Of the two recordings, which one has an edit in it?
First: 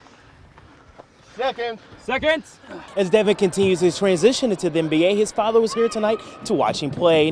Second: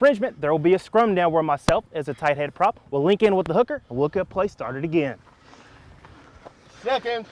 first; 1 cut; at 2.9 s

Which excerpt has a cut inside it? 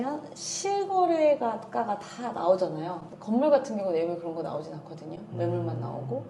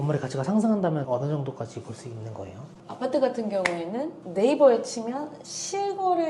second; 1 cut; at 4.2 s

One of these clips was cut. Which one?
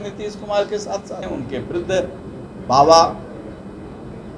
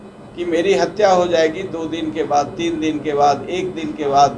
first; 1 cut; at 1.2 s

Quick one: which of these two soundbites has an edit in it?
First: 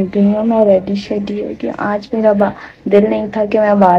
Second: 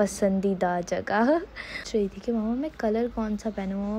second; 1 cut; at 1.8 s

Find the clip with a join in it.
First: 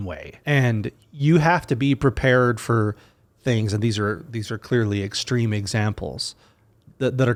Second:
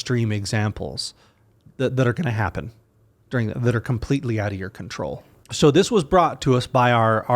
second; 1 cut; at 5.4 s

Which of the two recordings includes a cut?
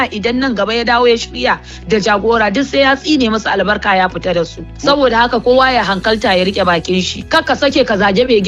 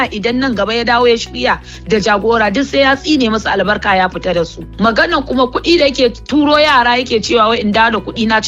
second; 1 cut; at 4.6 s

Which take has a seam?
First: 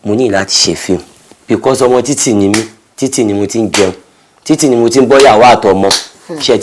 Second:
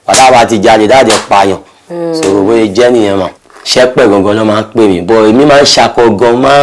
second; 1 cut; at 3.4 s

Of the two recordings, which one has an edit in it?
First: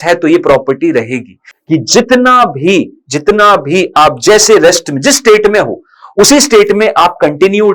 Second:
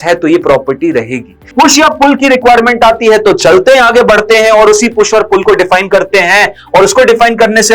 second; 1 cut; at 1.5 s

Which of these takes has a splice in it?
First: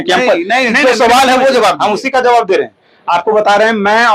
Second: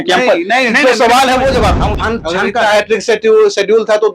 second; 1 cut; at 2.0 s

